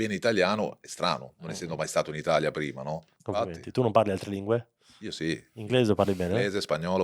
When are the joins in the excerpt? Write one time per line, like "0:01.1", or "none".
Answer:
0:03.1